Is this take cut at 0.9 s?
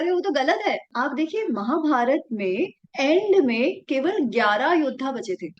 yes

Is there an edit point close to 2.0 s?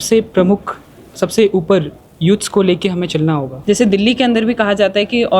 no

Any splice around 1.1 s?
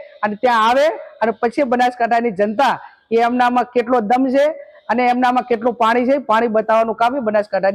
no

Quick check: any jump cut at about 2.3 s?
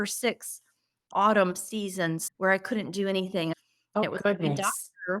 yes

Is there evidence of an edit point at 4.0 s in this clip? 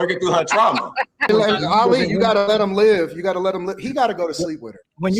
no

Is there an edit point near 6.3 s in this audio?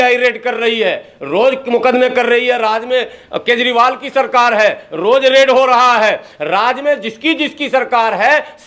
no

